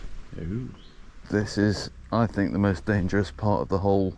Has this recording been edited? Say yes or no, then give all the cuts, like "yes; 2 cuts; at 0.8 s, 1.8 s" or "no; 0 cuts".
yes; 1 cut; at 1.1 s